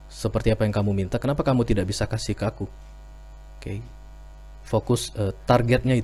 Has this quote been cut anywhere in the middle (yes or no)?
no